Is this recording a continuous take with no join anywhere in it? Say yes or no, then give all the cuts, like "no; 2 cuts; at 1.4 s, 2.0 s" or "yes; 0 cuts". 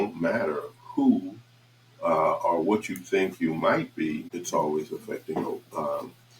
no; 1 cut; at 4.3 s